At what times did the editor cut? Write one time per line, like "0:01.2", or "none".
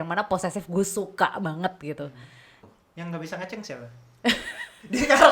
0:02.6